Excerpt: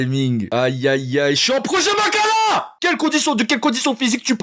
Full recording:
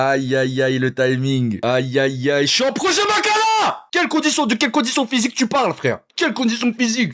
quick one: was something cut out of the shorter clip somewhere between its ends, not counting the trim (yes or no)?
no